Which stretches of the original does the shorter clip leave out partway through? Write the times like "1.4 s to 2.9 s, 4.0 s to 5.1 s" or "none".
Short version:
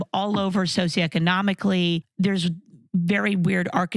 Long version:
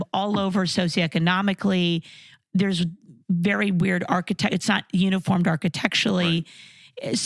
2.1 s to 2.4 s